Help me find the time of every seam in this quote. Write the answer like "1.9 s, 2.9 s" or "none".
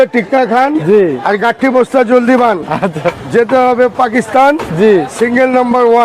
none